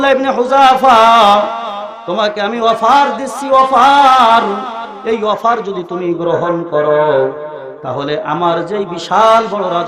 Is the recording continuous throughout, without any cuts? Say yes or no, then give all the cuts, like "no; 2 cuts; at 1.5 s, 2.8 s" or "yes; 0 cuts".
yes; 0 cuts